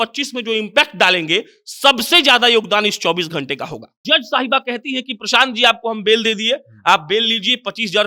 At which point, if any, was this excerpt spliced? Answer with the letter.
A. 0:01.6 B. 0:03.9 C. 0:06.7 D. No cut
B